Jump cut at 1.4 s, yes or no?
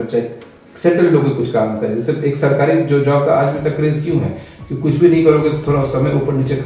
no